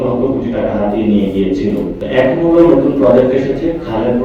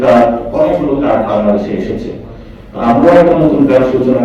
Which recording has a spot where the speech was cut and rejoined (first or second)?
first